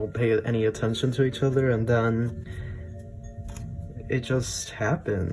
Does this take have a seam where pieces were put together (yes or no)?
no